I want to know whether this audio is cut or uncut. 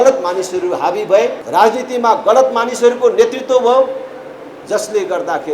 cut